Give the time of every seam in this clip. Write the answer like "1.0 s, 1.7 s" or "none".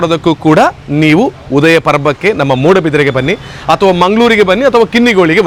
none